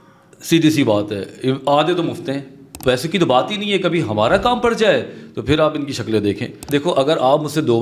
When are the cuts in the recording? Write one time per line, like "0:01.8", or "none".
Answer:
0:02.7
0:06.6